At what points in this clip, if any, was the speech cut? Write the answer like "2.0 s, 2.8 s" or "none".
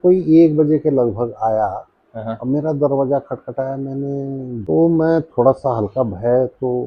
4.6 s